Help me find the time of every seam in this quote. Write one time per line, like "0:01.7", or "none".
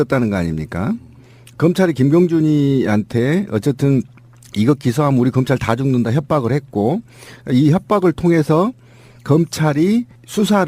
none